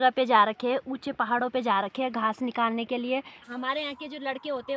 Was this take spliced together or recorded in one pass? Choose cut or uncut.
cut